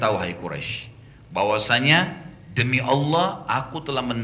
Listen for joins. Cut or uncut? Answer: uncut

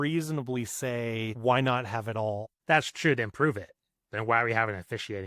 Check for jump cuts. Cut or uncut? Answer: cut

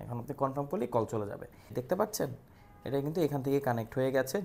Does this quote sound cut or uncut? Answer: cut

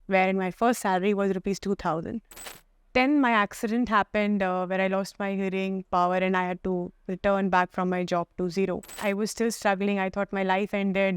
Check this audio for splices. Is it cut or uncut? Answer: cut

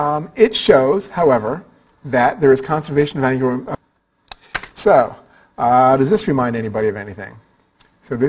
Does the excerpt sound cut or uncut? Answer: uncut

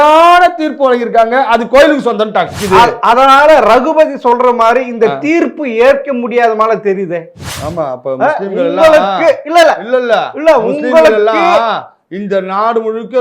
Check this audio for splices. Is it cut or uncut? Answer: cut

